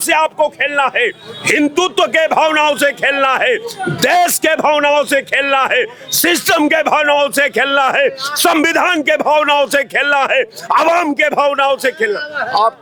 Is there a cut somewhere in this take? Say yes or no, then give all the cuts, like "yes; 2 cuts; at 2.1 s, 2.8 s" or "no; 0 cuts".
no; 0 cuts